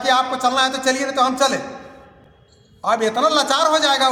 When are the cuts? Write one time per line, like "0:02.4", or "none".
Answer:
none